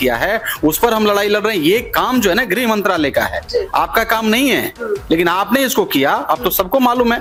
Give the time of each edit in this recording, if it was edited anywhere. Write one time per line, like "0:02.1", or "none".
none